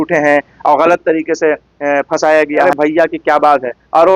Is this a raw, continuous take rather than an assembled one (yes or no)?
no